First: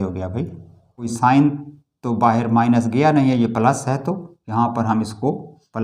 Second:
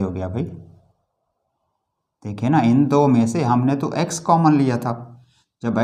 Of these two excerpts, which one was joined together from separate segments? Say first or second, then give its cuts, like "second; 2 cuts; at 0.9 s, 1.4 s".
first; 1 cut; at 1.1 s